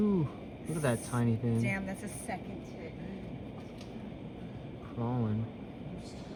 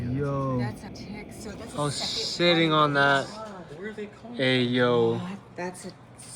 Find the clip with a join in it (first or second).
second